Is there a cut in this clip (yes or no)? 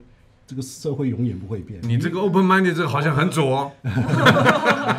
no